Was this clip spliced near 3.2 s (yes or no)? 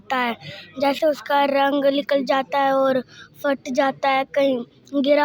no